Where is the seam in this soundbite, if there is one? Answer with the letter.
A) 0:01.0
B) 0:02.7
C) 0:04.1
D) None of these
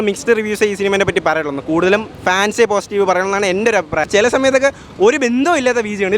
C